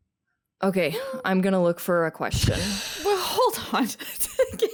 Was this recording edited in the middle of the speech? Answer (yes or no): no